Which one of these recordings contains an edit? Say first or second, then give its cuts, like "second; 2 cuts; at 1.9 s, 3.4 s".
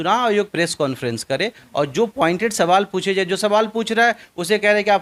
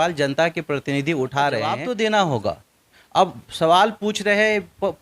second; 1 cut; at 1.8 s